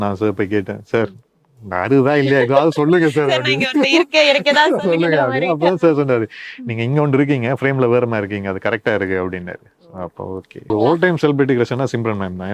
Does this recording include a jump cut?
yes; 1 cut; at 10.7 s

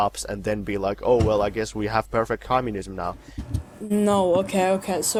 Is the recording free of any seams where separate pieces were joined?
yes; 0 cuts

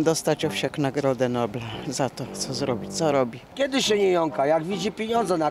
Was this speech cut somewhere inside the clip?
yes; 1 cut; at 3.5 s

